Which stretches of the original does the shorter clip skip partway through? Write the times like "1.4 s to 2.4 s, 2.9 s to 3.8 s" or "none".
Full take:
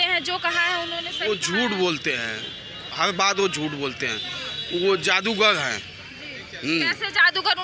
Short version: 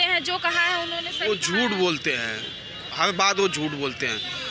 none